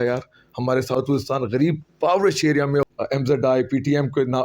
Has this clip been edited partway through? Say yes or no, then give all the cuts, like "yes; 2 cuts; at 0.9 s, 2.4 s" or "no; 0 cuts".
yes; 1 cut; at 2.9 s